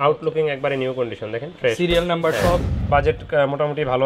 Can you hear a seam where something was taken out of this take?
yes; 1 cut; at 2.7 s

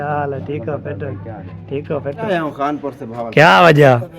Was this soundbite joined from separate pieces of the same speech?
yes; 1 cut; at 2.2 s

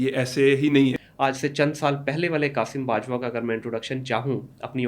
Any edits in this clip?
yes; 1 cut; at 1.1 s

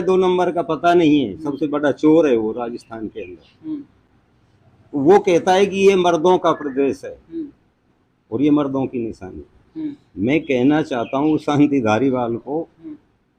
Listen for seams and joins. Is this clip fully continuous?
yes; 0 cuts

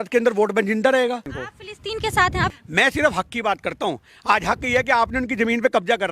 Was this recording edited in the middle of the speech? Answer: yes; 2 cuts; at 1.3 s, 2.5 s

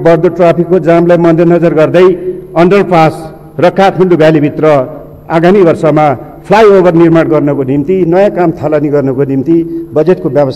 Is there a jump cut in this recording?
no; 0 cuts

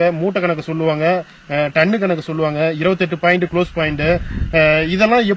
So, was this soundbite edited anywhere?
no; 0 cuts

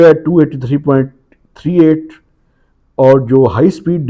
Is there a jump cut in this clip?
no; 0 cuts

